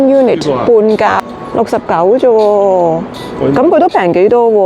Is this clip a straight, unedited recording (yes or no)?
no